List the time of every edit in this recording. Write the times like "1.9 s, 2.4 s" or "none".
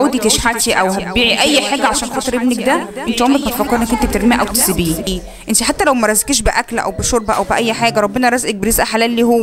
5.2 s